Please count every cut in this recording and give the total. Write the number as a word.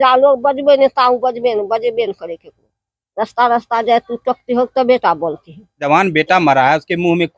one